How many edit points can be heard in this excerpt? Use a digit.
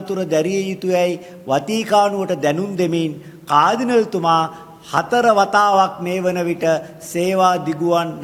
0